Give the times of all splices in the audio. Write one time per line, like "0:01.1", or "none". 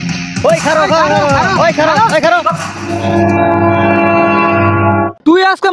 none

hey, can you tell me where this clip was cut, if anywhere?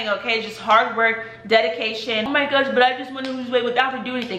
0:02.3

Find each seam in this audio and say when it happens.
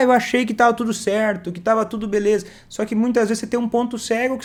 none

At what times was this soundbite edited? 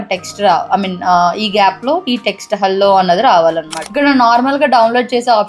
0:03.8

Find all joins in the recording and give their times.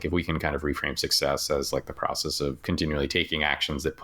0:02.6

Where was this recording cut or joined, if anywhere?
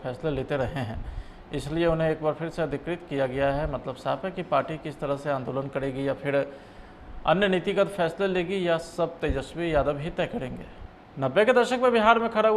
0:11.0

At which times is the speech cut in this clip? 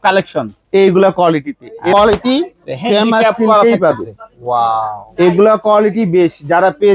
0:01.9

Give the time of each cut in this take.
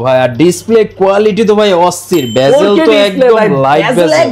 none

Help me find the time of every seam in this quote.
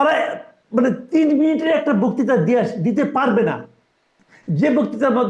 none

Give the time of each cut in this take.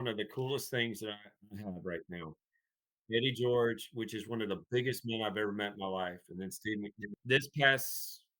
0:07.0

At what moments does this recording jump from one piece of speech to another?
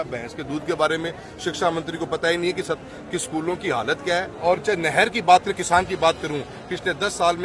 0:04.3

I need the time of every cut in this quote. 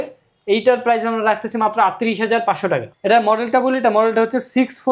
0:02.9

